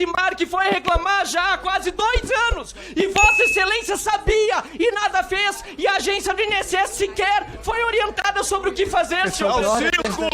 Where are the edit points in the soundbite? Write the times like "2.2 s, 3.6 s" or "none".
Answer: none